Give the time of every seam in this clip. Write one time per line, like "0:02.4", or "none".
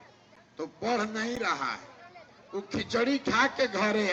none